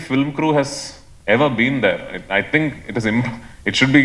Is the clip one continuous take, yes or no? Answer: yes